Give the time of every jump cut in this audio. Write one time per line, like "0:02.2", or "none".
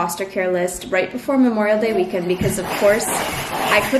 none